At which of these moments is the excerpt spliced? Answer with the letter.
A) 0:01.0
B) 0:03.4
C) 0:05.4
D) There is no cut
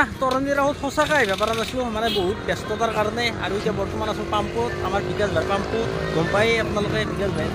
D